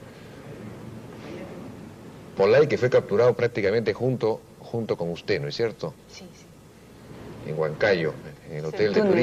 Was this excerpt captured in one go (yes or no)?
yes